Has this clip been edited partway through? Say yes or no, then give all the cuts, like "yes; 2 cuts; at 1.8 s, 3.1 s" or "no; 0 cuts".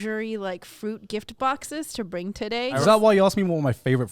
yes; 1 cut; at 2.7 s